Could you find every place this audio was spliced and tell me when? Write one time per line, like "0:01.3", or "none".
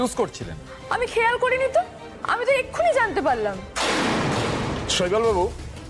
0:04.8